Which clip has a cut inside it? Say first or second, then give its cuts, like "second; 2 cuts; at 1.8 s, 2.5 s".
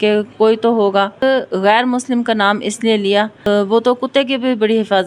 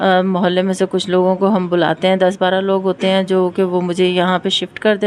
first; 2 cuts; at 1.2 s, 3.5 s